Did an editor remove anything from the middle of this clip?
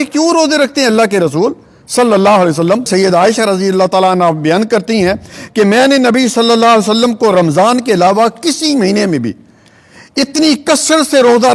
yes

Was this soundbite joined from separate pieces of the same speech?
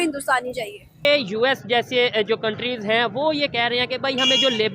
yes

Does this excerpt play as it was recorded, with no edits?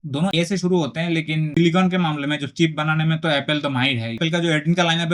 no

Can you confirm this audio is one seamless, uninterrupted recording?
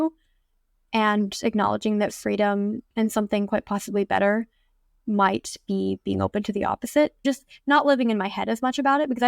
no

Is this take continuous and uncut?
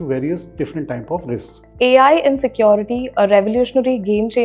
no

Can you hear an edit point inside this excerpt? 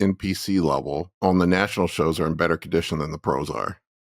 yes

